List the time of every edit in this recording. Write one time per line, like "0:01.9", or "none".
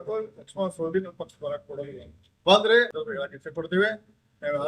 0:03.0